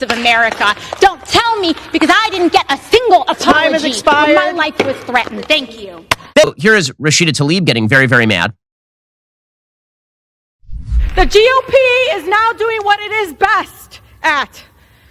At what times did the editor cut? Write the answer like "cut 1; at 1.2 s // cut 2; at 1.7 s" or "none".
cut 1; at 6.4 s